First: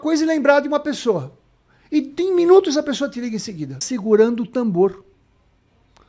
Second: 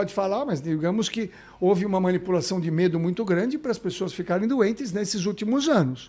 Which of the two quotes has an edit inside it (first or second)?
first